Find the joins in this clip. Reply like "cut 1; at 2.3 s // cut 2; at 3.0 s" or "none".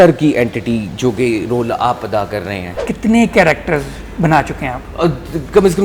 cut 1; at 2.8 s